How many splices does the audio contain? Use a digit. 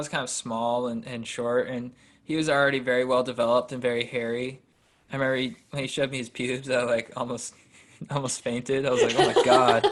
0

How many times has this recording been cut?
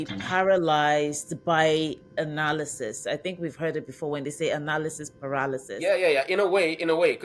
1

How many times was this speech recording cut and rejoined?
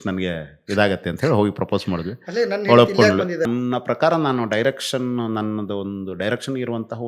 1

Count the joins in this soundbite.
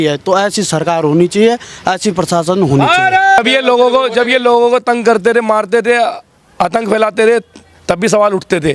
1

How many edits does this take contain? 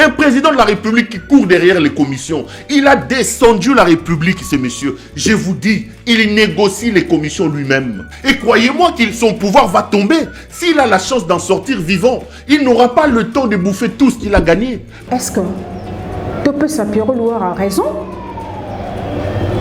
2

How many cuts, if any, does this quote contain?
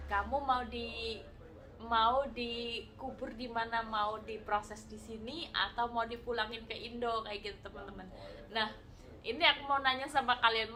0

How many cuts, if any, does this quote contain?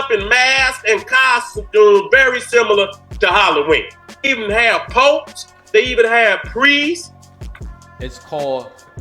1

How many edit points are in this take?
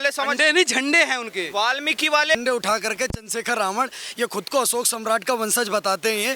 1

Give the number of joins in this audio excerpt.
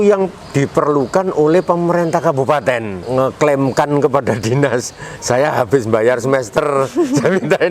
1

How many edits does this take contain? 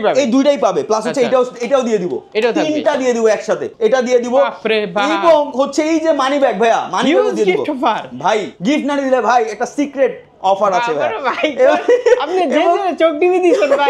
2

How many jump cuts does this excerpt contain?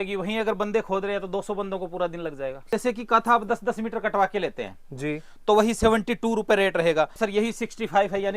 2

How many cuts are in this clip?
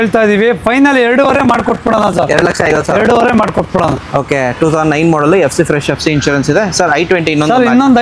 0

